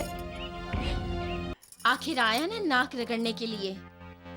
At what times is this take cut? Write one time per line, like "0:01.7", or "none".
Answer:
0:01.5